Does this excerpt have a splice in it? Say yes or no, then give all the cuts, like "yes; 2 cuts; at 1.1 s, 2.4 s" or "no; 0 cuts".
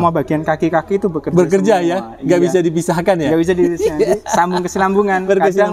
no; 0 cuts